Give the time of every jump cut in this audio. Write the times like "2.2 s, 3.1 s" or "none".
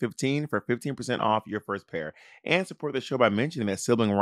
none